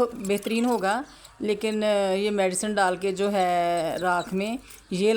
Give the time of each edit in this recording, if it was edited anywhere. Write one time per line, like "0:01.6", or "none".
0:01.1